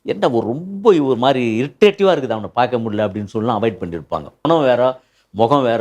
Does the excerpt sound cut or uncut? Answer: cut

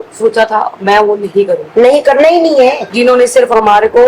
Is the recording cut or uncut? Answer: cut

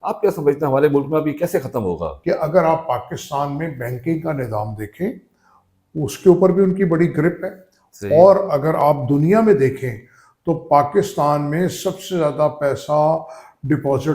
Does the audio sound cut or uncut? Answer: cut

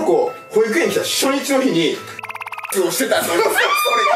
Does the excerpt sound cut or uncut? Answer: cut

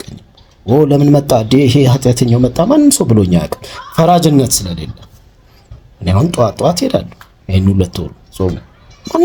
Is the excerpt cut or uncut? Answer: uncut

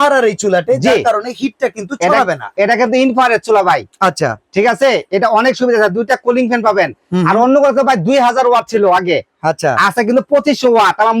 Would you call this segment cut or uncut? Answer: uncut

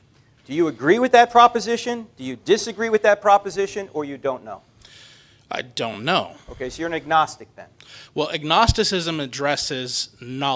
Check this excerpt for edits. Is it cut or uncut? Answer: uncut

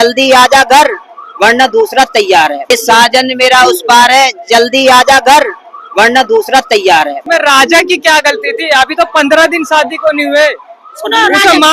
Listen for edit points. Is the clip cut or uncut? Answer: cut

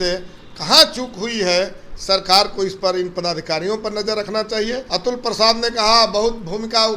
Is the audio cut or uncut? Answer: cut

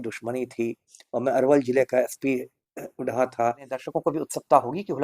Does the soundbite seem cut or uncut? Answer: cut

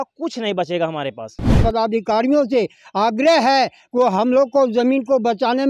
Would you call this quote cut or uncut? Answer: cut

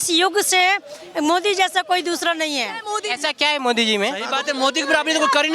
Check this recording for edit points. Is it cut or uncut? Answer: cut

